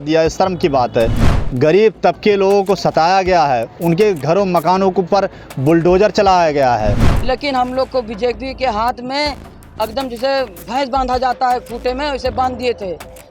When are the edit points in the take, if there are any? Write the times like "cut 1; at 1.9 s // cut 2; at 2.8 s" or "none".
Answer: cut 1; at 1.3 s // cut 2; at 7.1 s